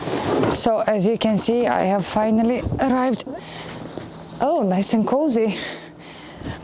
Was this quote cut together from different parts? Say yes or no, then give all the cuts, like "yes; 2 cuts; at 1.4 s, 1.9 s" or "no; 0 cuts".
yes; 1 cut; at 3.3 s